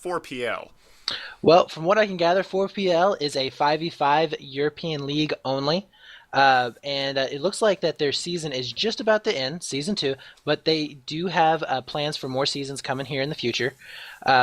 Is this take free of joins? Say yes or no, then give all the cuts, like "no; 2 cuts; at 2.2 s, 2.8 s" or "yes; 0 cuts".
yes; 0 cuts